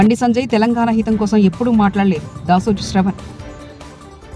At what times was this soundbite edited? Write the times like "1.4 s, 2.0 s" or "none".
none